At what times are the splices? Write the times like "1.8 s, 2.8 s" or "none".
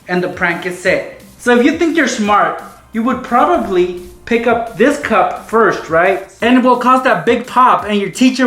6.3 s